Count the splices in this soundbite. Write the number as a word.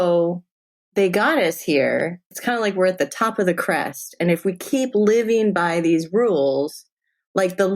one